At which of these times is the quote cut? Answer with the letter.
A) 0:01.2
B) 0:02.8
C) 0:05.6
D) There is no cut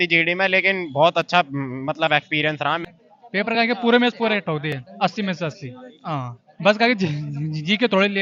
B